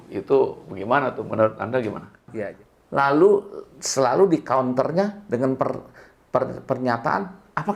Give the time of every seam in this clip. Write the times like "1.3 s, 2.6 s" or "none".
2.3 s